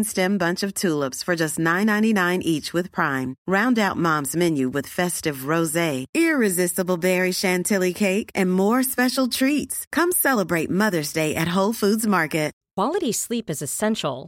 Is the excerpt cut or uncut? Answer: cut